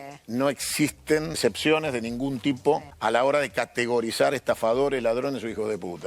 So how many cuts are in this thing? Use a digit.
2